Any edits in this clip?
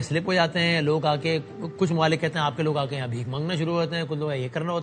no; 0 cuts

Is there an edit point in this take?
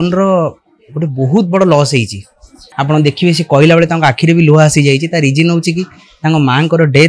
yes; 1 cut; at 2.6 s

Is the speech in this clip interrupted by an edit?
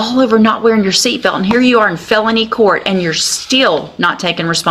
no; 0 cuts

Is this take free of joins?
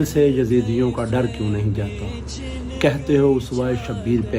yes; 0 cuts

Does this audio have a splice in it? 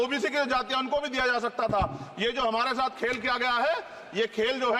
no; 0 cuts

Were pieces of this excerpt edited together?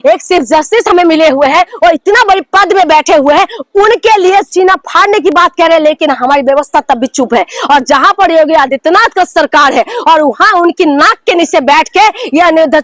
no; 0 cuts

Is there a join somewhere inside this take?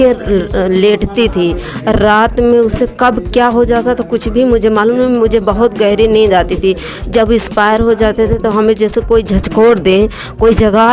no; 0 cuts

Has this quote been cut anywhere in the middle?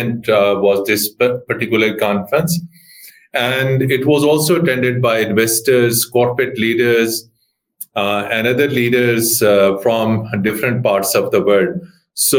no; 0 cuts

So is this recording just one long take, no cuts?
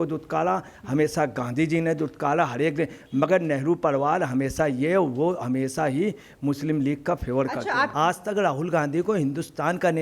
no; 1 cut; at 7.9 s

